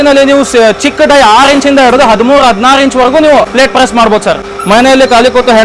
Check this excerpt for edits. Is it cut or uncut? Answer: cut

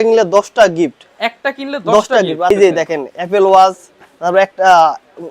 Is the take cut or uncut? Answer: cut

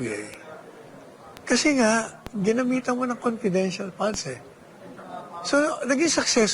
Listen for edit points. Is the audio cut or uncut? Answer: uncut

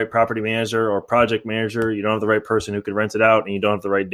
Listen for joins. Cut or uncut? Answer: uncut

